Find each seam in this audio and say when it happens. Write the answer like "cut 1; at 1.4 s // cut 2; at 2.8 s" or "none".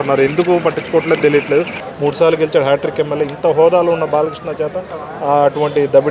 cut 1; at 1.8 s

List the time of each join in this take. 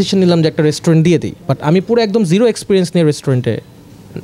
none

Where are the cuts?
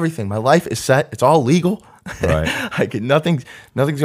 none

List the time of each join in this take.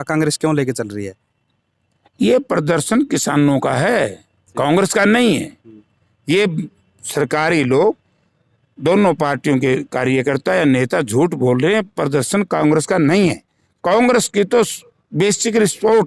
none

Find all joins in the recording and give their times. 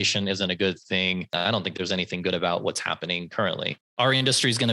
cut 1; at 1.3 s // cut 2; at 3.8 s

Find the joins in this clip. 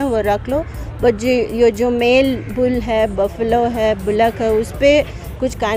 none

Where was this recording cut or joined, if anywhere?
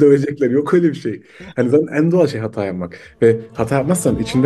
none

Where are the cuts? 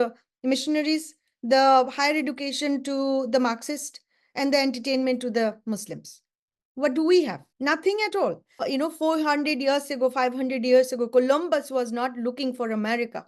cut 1; at 7.4 s // cut 2; at 8.6 s

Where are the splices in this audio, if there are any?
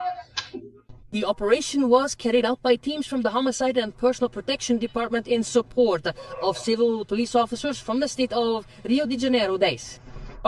none

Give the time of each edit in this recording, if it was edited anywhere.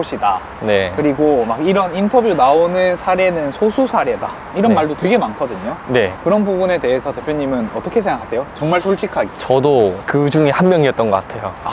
none

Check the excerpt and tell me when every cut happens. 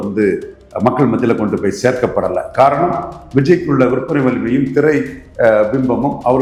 none

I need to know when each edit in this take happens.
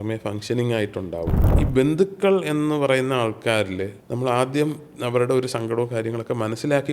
cut 1; at 1.4 s // cut 2; at 4.0 s

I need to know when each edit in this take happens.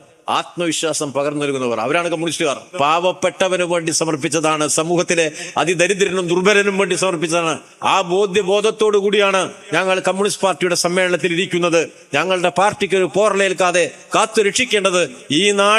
cut 1; at 2.7 s

